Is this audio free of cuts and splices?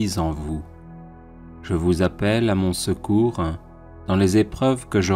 yes; 0 cuts

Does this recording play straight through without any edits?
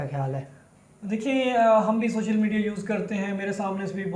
yes; 0 cuts

